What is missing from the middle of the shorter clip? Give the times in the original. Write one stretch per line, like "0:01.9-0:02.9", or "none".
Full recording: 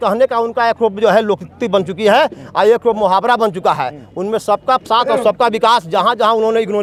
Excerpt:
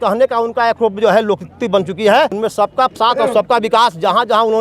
0:02.3-0:04.2